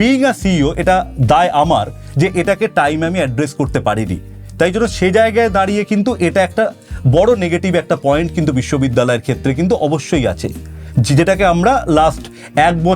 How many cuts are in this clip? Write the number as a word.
zero